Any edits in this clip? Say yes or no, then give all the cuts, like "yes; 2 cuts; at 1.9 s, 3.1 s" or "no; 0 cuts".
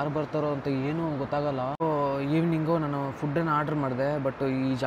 yes; 1 cut; at 1.8 s